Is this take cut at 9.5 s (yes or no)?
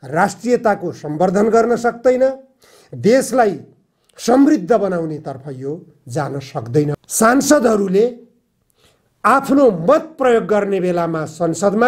no